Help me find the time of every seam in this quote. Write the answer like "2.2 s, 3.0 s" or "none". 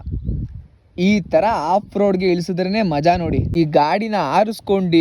3.5 s